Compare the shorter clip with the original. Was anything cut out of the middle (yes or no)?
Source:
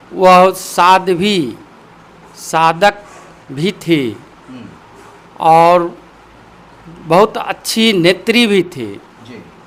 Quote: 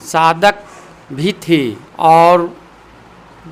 yes